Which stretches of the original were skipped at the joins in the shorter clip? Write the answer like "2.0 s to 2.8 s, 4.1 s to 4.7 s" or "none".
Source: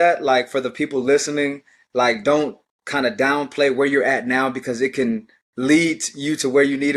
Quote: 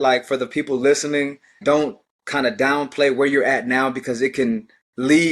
1.8 s to 2.2 s